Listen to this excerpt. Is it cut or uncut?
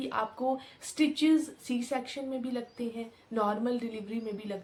uncut